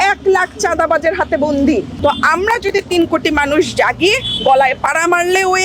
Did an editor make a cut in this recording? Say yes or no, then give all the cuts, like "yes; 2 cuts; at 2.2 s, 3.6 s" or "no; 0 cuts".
no; 0 cuts